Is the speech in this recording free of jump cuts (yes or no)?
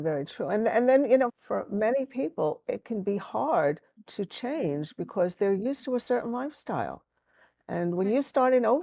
no